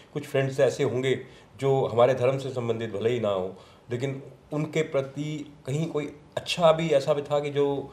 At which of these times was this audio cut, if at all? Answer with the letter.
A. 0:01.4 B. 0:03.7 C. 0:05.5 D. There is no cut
D